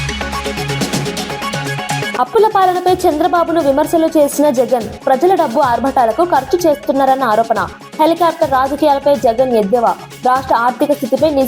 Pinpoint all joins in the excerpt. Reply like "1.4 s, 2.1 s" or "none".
2.1 s